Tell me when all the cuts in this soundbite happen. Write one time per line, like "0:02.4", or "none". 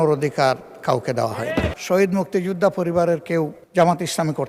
0:01.7
0:03.6